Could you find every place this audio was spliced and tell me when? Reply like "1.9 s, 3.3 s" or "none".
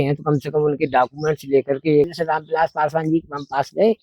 2.1 s